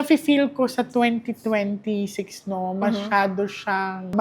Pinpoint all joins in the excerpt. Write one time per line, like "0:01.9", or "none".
none